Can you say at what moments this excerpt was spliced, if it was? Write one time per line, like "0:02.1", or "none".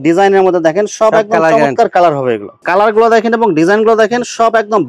0:02.5